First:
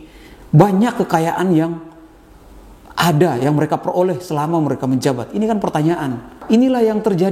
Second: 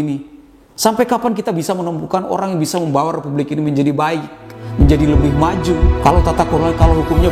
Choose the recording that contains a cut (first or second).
first